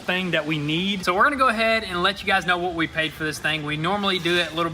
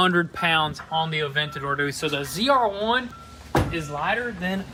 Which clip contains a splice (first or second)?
first